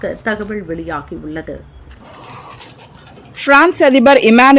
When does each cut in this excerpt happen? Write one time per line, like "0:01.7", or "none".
0:02.0